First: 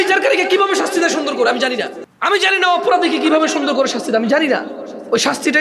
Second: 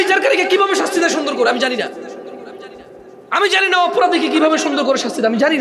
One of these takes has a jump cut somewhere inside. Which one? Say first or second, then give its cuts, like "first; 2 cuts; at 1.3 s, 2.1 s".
first; 1 cut; at 2.0 s